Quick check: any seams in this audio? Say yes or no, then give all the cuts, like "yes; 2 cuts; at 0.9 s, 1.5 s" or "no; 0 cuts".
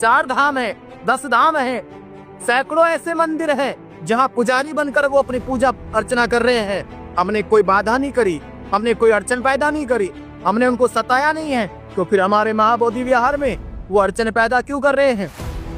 no; 0 cuts